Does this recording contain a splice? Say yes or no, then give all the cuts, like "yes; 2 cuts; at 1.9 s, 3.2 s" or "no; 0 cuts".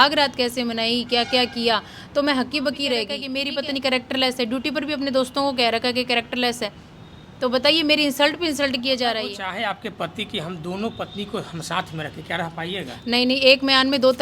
yes; 2 cuts; at 3.2 s, 9.5 s